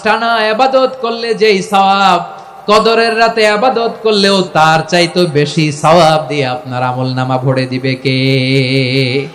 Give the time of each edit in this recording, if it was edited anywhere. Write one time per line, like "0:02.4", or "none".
0:04.5